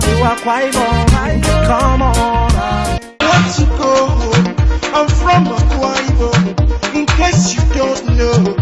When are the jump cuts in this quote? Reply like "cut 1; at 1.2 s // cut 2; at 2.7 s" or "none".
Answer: cut 1; at 3.0 s